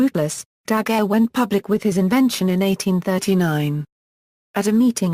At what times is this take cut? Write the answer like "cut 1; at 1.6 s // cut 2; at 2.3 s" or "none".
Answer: cut 1; at 1.7 s